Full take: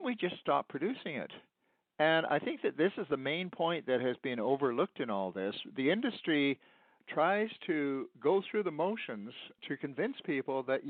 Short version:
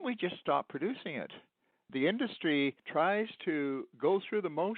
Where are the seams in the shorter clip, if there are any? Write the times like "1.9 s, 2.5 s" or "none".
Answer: 1.8 s, 2.8 s